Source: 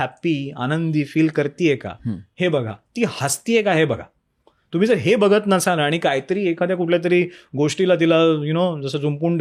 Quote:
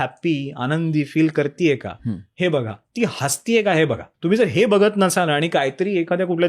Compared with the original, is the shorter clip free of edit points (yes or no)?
no